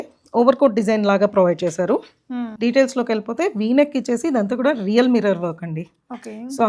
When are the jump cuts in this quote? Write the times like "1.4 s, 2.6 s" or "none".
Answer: 2.5 s